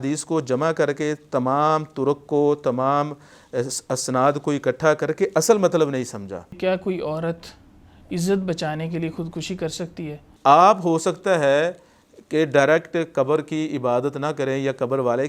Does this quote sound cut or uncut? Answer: cut